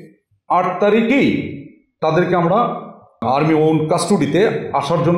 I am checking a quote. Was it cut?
yes; 1 cut; at 3.2 s

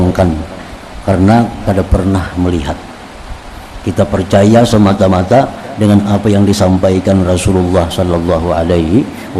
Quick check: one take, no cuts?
yes; 0 cuts

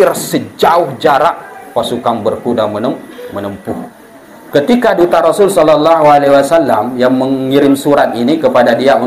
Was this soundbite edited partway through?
yes; 1 cut; at 3.9 s

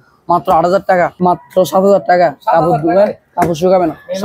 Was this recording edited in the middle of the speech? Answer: yes; 1 cut; at 1.1 s

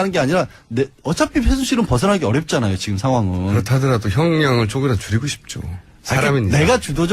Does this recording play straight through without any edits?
no; 1 cut; at 4.3 s

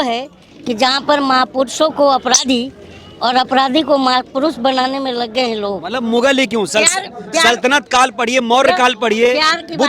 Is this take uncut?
no; 1 cut; at 5.9 s

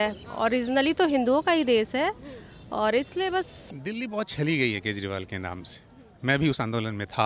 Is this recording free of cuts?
no; 1 cut; at 3.6 s

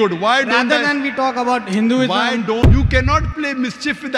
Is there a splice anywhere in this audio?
yes; 1 cut; at 2.6 s

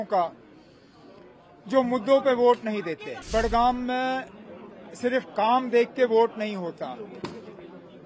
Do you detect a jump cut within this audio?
yes; 1 cut; at 3.1 s

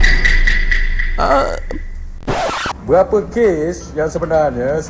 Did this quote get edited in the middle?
yes; 1 cut; at 2.3 s

